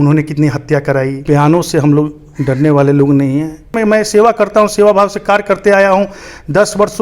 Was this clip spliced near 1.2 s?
yes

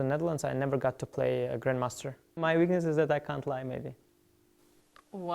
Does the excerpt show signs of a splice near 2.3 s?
yes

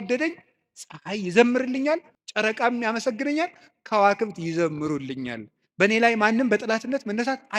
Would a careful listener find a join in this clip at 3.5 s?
no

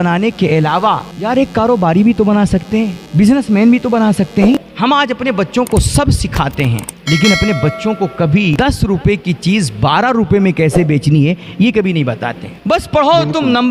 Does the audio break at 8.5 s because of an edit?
yes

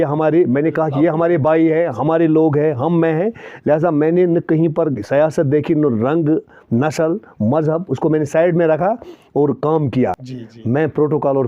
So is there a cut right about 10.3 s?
yes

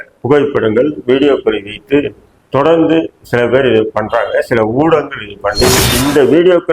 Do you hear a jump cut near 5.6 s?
yes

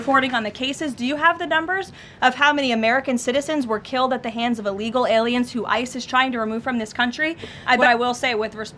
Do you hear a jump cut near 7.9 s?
yes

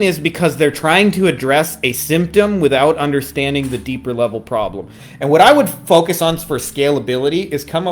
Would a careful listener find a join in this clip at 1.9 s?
no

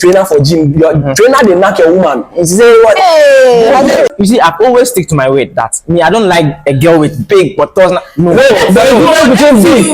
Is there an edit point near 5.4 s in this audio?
no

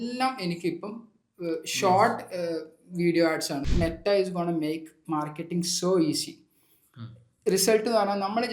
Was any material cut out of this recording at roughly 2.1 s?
no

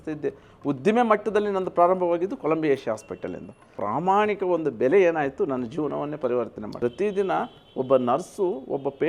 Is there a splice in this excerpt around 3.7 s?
yes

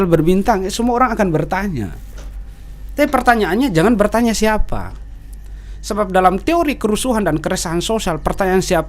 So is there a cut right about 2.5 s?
no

